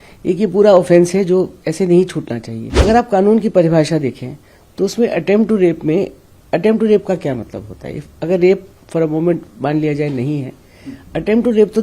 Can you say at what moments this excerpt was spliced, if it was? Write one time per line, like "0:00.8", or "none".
0:02.7